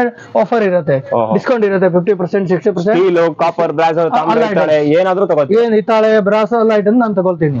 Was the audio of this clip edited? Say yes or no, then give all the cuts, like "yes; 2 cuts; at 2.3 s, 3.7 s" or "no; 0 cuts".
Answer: no; 0 cuts